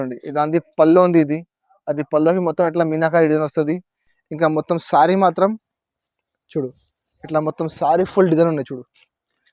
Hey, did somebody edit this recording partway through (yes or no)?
no